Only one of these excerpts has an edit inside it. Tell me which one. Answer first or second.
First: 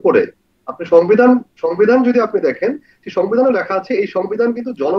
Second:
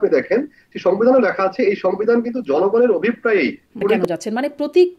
second